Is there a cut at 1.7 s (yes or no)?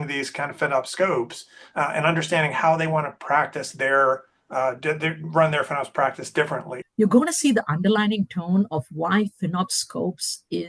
no